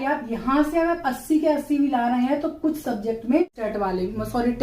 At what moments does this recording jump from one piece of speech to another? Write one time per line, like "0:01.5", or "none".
0:03.6